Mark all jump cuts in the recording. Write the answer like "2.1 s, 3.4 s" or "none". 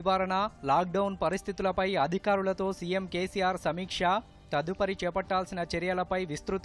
none